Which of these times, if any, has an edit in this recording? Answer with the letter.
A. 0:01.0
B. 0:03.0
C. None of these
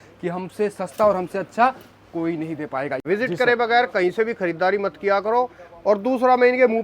B